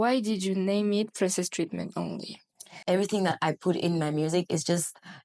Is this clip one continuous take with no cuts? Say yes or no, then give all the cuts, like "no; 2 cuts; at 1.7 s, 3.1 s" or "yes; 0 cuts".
no; 1 cut; at 2.7 s